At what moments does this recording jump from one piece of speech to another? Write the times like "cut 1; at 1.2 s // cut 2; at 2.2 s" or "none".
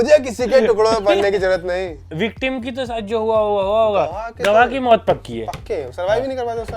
cut 1; at 2.1 s

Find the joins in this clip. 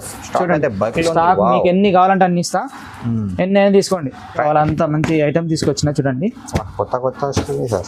cut 1; at 4.4 s

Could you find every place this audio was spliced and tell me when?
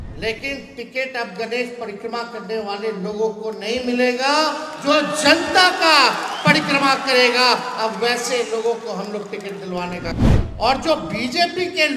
cut 1; at 10.2 s

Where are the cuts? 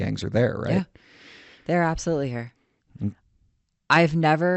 cut 1; at 3.1 s

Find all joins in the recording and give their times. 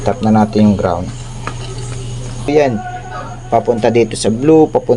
cut 1; at 2.5 s

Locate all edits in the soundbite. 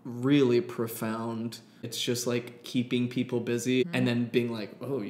cut 1; at 1.9 s // cut 2; at 3.8 s

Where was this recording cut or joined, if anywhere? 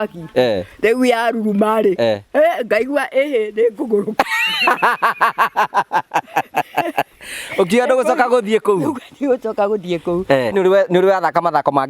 cut 1; at 10.5 s

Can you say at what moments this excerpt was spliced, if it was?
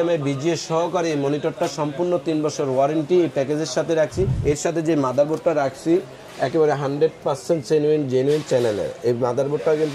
cut 1; at 4.4 s

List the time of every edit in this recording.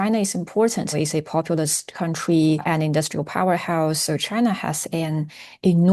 cut 1; at 0.9 s

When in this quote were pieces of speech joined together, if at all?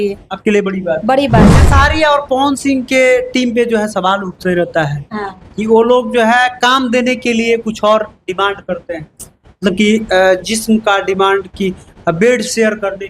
cut 1; at 1.6 s

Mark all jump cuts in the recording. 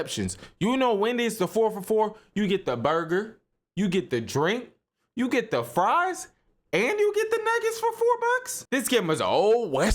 cut 1; at 8.5 s

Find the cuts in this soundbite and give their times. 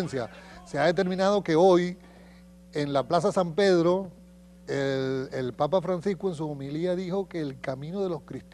none

